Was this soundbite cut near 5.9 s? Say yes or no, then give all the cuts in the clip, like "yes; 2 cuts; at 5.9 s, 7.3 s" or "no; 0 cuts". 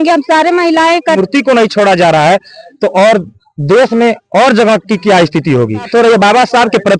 yes; 2 cuts; at 1.2 s, 5.9 s